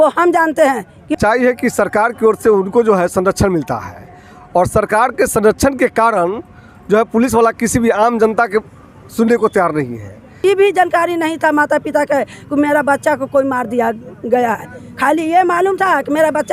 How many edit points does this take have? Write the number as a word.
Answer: two